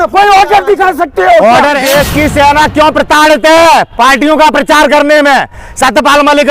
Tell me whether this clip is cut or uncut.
cut